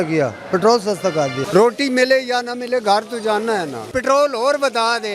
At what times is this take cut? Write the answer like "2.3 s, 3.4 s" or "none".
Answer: 1.4 s, 3.8 s